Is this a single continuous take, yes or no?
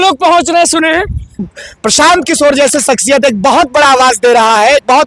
no